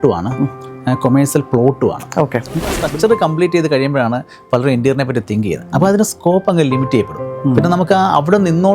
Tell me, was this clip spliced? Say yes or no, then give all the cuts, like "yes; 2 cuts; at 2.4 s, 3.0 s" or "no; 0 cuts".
yes; 1 cut; at 2.7 s